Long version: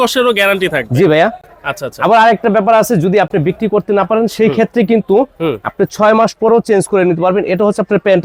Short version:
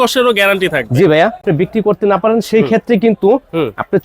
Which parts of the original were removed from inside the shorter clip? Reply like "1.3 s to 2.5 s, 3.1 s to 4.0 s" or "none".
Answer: 1.5 s to 3.3 s